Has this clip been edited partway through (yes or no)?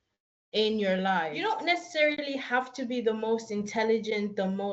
yes